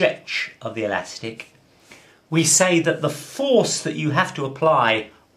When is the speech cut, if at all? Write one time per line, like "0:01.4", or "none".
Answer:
0:01.1